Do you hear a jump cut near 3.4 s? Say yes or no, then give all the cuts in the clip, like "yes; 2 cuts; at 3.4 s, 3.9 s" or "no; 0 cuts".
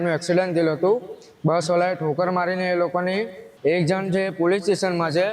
yes; 1 cut; at 3.4 s